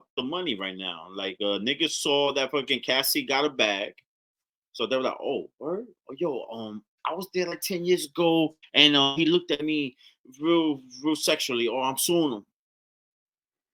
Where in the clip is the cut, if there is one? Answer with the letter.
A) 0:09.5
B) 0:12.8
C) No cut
C